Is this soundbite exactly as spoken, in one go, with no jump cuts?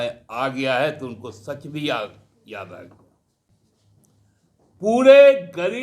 no; 1 cut; at 3.5 s

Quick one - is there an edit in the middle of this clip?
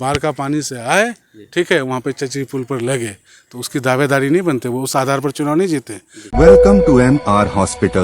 yes; 1 cut; at 6.2 s

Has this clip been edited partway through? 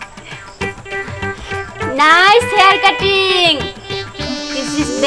no; 0 cuts

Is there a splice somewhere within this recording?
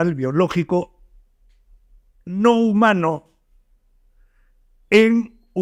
no; 0 cuts

